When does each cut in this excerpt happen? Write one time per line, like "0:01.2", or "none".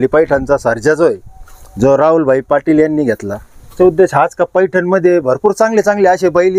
0:03.8

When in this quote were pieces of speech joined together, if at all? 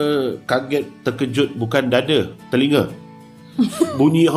none

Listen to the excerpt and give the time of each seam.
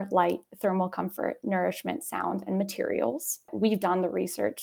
0:03.5

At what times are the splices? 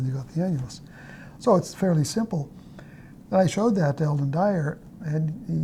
none

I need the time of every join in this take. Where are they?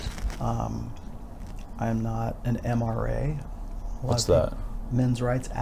none

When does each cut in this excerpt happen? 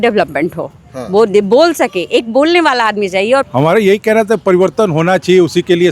0:03.5

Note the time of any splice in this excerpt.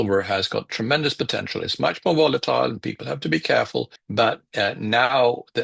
none

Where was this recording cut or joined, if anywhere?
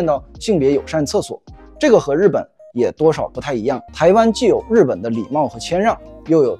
0:03.9

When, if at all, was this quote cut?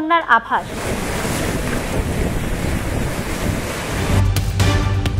none

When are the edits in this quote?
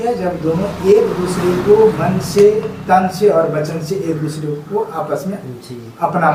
none

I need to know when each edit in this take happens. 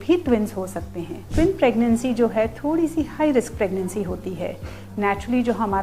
0:01.3

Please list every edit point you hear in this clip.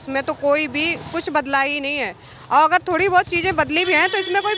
none

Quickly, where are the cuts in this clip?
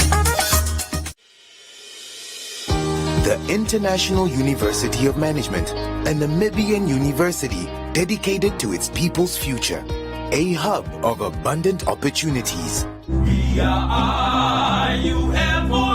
0:01.1

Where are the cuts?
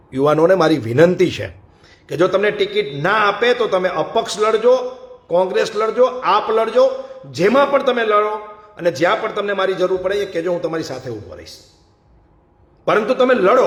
none

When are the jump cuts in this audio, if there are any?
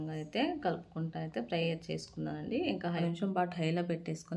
0:03.0

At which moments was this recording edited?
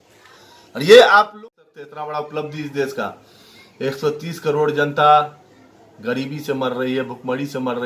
0:01.3

